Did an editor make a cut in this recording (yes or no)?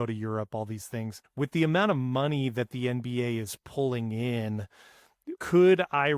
yes